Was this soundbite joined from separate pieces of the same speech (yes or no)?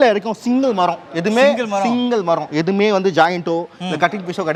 no